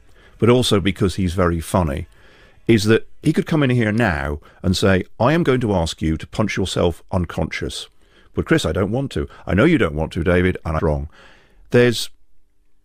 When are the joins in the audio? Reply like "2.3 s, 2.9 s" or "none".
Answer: none